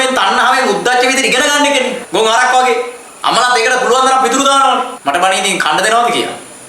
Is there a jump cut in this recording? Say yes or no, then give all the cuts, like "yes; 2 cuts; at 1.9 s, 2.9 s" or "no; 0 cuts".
yes; 3 cuts; at 2.0 s, 3.0 s, 4.9 s